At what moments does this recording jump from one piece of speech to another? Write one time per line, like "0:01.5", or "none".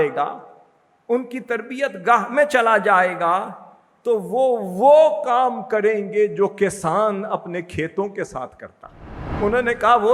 0:09.2